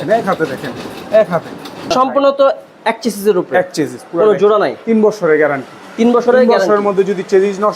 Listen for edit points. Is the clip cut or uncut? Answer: cut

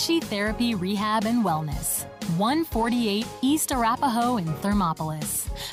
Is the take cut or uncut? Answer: uncut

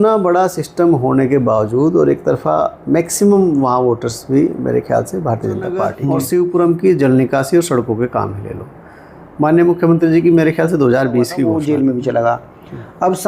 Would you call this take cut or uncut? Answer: cut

